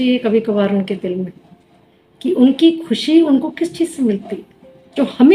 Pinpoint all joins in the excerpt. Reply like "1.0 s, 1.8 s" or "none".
none